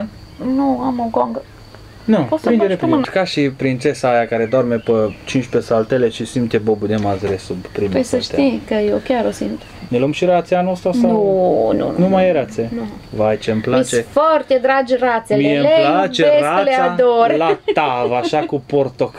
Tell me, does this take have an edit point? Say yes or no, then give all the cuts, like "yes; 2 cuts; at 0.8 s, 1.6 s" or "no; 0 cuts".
yes; 2 cuts; at 3.1 s, 9.8 s